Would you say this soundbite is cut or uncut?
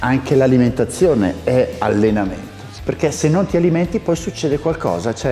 cut